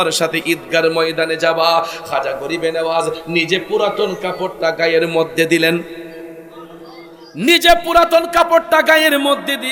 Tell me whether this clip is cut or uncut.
uncut